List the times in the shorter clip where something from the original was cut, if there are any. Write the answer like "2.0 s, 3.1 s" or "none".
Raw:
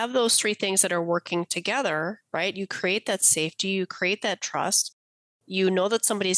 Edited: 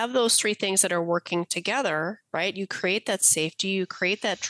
none